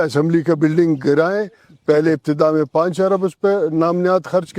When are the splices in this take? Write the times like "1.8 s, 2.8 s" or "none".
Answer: none